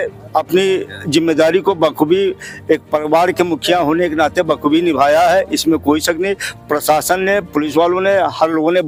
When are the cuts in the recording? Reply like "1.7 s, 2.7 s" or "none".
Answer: none